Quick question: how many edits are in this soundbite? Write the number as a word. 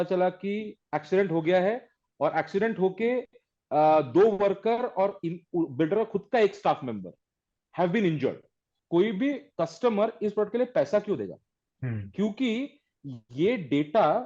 one